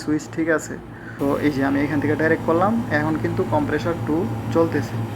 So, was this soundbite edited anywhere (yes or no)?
yes